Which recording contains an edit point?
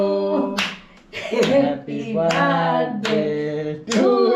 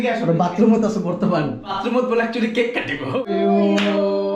second; 2 cuts; at 1.8 s, 3.1 s

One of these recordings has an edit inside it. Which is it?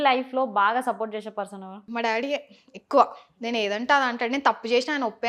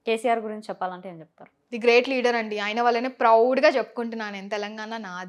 first; 1 cut; at 1.8 s

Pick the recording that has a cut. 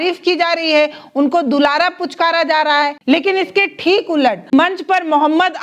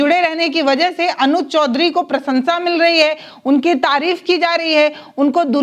first; 1 cut; at 3.0 s

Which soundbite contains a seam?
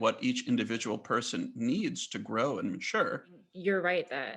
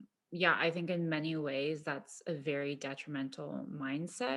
first; 1 cut; at 3.5 s

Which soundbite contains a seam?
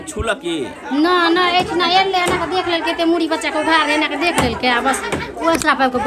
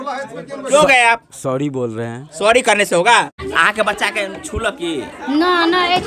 second; 1 cut; at 3.5 s

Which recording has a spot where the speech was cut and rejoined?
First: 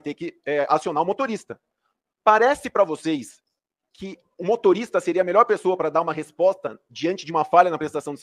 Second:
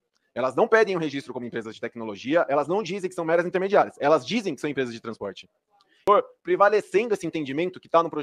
second; 1 cut; at 6.0 s

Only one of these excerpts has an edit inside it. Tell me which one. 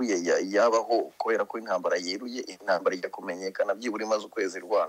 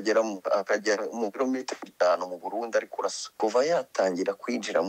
second; 1 cut; at 3.2 s

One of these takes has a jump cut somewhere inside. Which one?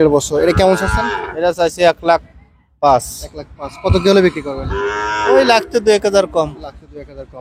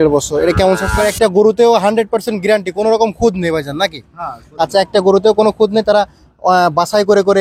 second; 1 cut; at 1.0 s

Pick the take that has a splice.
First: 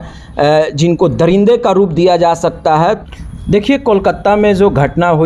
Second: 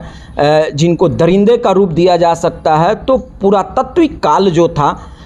first; 1 cut; at 3.0 s

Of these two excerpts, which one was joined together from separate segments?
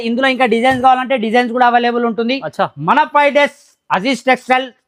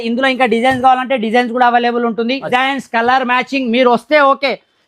second; 1 cut; at 2.5 s

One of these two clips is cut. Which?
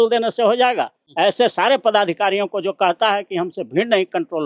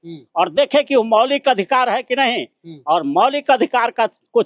first; 1 cut; at 1.0 s

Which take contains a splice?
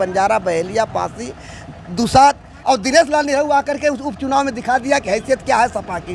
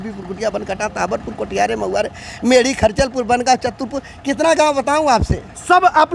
first; 1 cut; at 2.6 s

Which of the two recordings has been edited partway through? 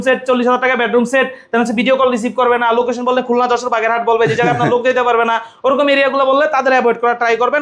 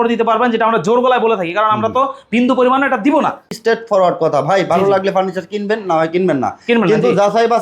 second; 1 cut; at 3.4 s

